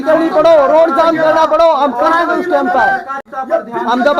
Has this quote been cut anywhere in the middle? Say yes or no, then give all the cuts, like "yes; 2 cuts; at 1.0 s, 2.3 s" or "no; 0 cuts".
no; 0 cuts